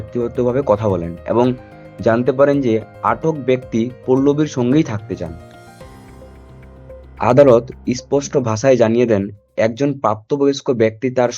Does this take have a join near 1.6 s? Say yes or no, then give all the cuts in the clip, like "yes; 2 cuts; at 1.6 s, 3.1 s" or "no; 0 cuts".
no; 2 cuts; at 5.4 s, 6.8 s